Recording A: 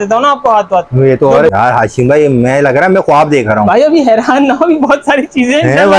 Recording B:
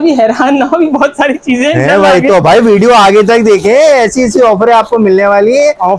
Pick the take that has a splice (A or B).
A